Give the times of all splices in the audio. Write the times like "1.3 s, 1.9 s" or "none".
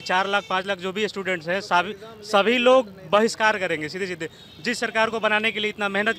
none